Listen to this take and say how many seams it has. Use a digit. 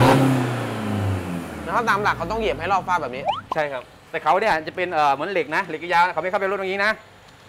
0